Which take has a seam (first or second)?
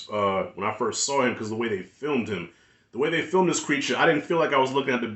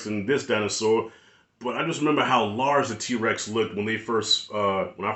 first